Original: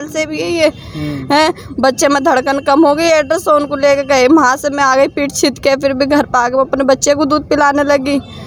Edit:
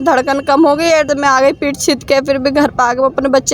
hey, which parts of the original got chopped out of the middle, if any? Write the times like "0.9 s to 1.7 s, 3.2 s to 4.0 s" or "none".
3.3 s to 4.6 s